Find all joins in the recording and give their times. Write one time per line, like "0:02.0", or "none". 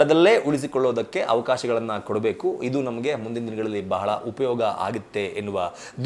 none